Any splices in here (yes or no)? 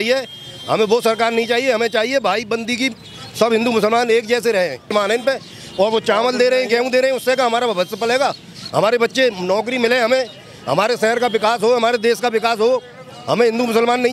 yes